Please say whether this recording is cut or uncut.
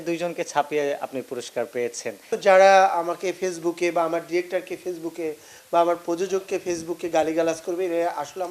cut